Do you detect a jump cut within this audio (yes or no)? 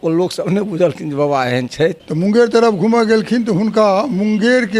yes